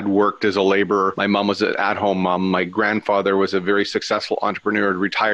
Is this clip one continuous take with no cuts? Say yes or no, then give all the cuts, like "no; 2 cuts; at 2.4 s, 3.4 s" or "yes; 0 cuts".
no; 1 cut; at 1.2 s